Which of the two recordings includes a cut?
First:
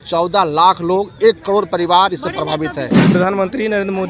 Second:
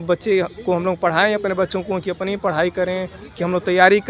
first; 1 cut; at 3.0 s

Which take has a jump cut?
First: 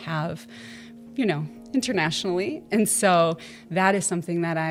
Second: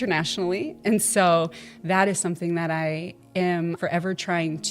second; 1 cut; at 3.8 s

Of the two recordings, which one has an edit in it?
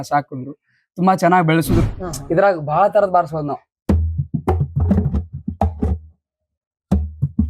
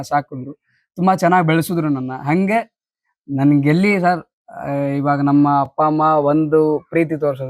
first; 1 cut; at 1.8 s

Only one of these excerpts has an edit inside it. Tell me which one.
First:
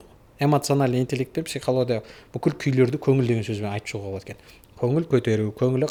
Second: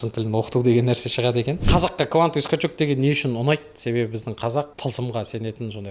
second; 2 cuts; at 1.6 s, 4.7 s

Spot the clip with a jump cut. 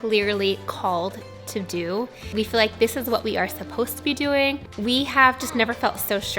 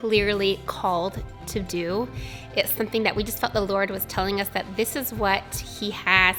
first; 2 cuts; at 2.3 s, 4.7 s

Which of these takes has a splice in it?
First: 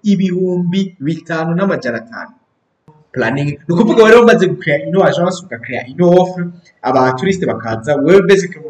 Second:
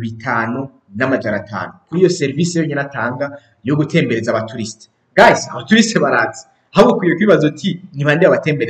first; 1 cut; at 3.0 s

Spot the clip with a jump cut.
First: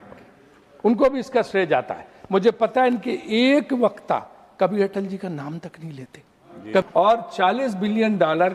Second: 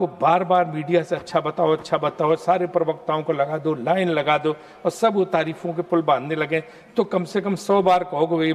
first; 1 cut; at 6.8 s

